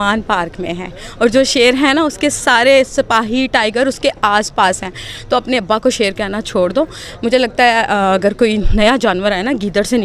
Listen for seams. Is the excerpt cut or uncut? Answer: uncut